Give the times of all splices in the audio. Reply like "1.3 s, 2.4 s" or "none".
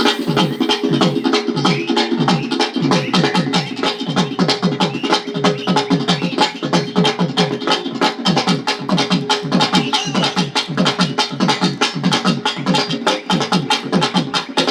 none

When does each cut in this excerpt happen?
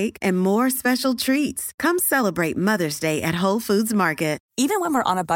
4.4 s

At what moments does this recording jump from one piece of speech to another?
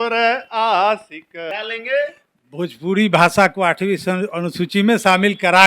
1.5 s

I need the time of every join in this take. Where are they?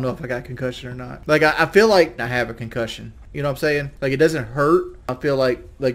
1.1 s, 5.1 s

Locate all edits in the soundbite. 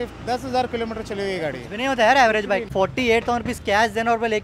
2.7 s

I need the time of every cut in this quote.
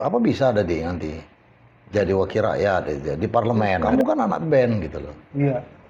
3.8 s

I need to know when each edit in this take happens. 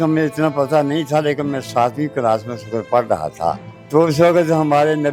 3.7 s

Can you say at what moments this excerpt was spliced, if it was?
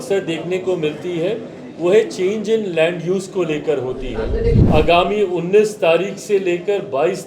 4.6 s

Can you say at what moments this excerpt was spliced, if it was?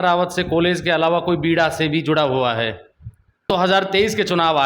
3.5 s

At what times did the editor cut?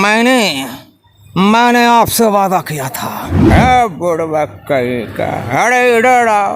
3.3 s

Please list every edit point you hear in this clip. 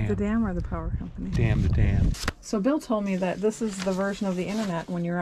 2.2 s

